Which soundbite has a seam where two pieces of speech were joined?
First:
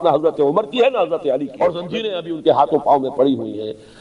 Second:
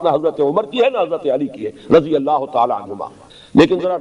first; 1 cut; at 1.5 s

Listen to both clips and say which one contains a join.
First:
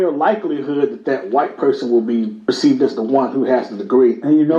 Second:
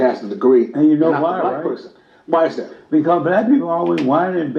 first; 1 cut; at 2.5 s

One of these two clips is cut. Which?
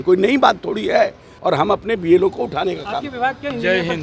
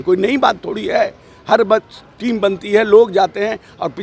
first; 1 cut; at 1.3 s

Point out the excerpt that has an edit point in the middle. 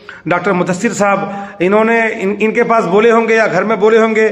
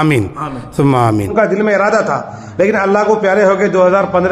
second; 1 cut; at 1.3 s

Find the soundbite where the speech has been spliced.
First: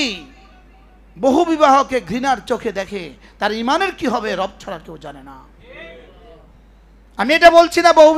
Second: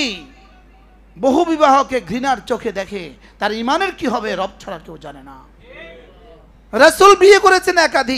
second; 1 cut; at 6.6 s

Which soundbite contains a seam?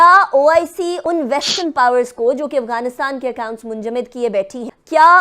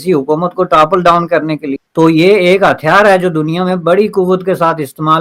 first; 1 cut; at 1.0 s

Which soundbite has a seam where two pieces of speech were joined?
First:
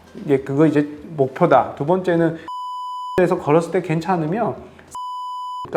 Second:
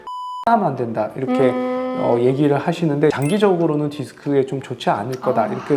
second; 1 cut; at 3.2 s

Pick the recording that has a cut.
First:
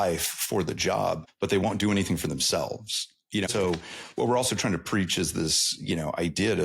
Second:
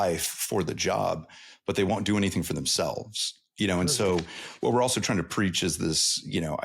first; 2 cuts; at 1.3 s, 3.5 s

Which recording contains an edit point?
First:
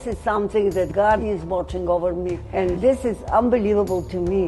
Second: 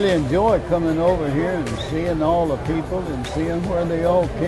first; 2 cuts; at 1.0 s, 2.6 s

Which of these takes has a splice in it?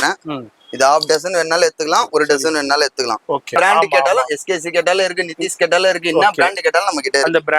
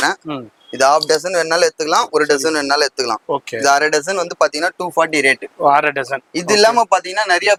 first; 1 cut; at 3.6 s

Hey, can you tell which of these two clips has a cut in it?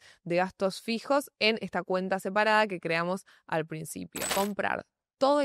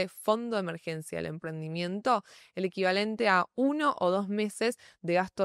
first; 1 cut; at 4.2 s

